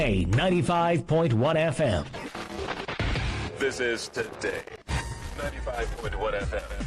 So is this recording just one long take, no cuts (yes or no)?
no